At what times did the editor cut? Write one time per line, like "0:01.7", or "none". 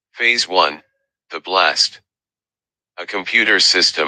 none